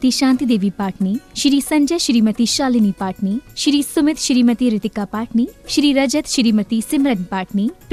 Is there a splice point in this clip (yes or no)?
no